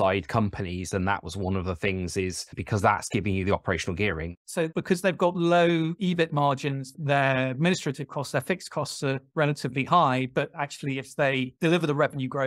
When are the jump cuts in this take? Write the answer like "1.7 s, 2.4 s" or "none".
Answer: 9.2 s